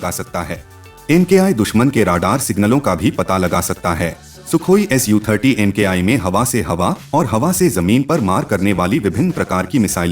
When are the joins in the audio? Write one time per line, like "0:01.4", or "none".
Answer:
0:01.1
0:04.3